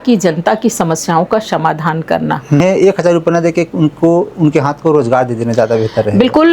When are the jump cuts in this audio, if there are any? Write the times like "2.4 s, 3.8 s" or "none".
2.6 s